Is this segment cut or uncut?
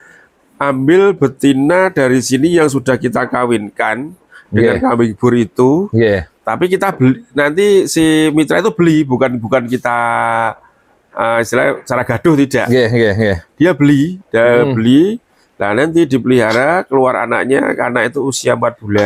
uncut